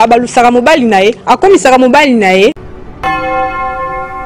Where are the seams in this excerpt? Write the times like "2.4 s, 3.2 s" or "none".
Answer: 2.7 s